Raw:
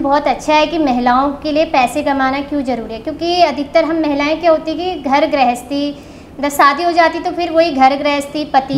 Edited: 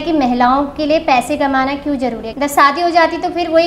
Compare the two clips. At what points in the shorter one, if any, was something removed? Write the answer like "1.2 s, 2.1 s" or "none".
2.2 s